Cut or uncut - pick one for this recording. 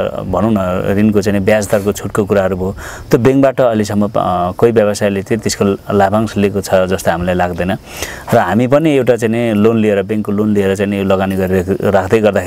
uncut